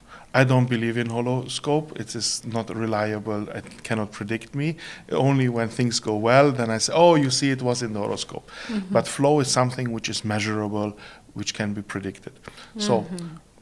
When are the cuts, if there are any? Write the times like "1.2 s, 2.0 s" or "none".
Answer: none